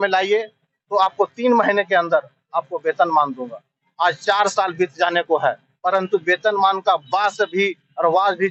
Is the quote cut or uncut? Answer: uncut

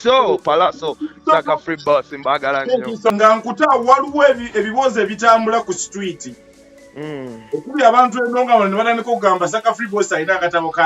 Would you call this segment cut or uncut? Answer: cut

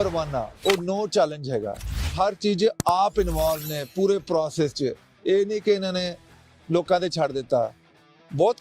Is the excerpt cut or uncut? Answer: cut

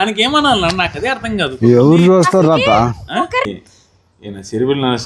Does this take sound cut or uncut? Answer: cut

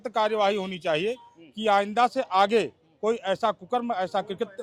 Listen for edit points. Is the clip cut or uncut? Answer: uncut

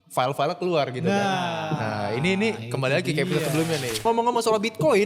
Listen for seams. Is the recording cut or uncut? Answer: cut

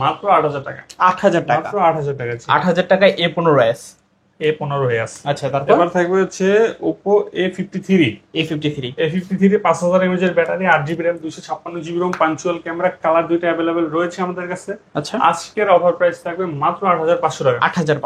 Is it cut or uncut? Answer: uncut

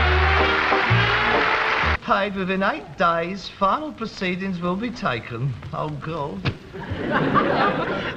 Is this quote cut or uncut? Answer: uncut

